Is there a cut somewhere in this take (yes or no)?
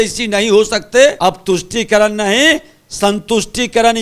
yes